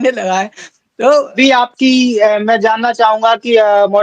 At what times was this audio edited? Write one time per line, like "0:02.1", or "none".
0:01.3